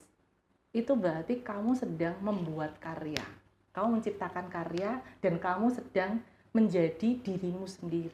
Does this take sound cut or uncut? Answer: uncut